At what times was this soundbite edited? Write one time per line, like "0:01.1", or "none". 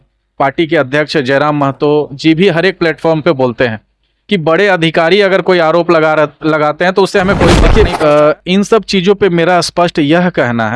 0:07.6

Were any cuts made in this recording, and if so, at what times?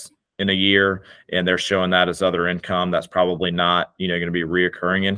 none

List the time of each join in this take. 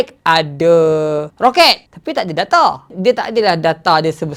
none

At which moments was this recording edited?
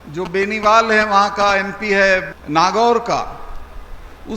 0:02.3

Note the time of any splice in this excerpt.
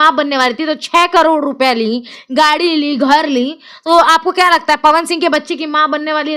none

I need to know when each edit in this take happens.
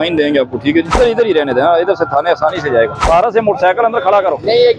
0:01.0
0:03.0

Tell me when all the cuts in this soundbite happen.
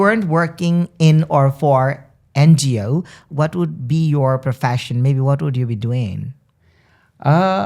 0:03.2

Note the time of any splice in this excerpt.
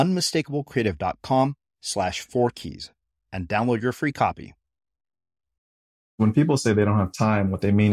0:06.2

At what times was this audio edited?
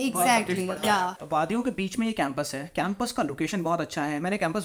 0:01.2

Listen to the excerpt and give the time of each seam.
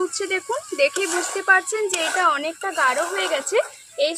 none

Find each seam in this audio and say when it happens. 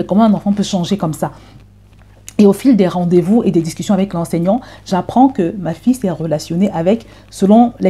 none

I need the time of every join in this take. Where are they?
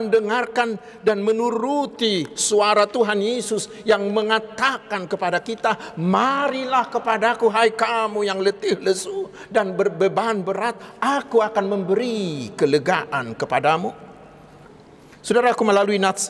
0:14.8

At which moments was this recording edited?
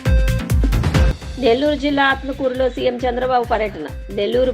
none

